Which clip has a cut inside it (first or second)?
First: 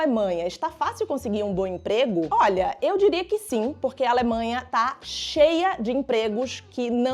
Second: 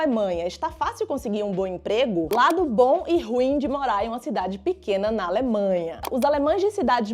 second